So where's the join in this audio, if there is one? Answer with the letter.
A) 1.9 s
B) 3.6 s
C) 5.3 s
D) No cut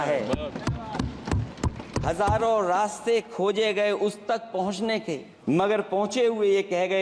C